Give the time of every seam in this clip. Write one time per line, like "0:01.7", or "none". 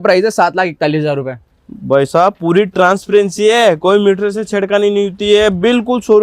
none